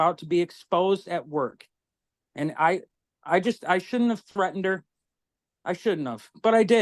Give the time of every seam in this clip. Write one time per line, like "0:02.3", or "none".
none